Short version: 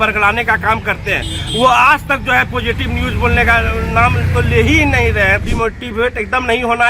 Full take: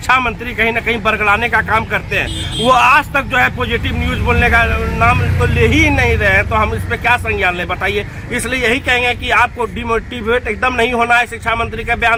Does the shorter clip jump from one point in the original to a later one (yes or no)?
yes